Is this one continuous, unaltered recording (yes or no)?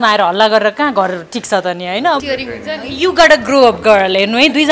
no